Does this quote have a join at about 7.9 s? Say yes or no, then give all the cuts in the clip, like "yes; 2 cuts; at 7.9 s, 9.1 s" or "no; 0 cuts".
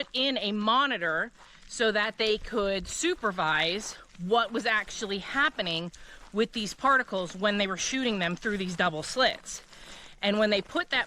no; 0 cuts